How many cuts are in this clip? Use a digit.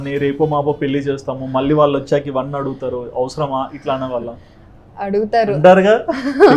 0